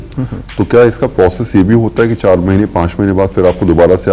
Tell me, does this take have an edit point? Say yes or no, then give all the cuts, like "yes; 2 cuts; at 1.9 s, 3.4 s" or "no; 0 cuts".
no; 0 cuts